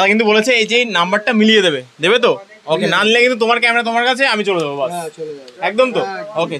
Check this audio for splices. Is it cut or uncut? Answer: uncut